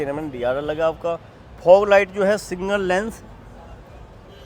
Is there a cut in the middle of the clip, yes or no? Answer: no